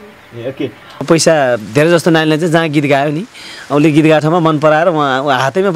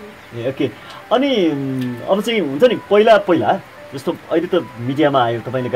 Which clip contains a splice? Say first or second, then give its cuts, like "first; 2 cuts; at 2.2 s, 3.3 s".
first; 1 cut; at 1.0 s